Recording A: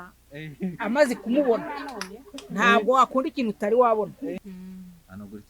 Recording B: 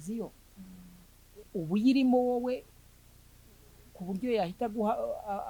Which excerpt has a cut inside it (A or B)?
A